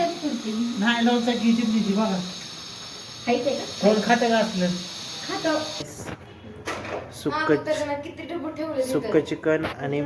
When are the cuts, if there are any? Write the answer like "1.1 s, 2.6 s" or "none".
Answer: 5.9 s